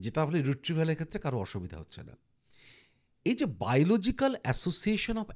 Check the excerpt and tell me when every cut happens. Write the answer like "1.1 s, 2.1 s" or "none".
none